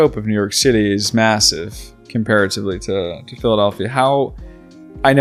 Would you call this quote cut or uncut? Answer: uncut